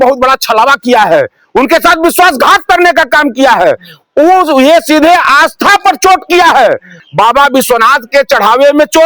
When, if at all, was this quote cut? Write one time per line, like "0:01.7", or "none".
0:07.0